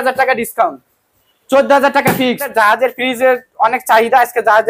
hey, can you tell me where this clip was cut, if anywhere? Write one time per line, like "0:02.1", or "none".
0:02.5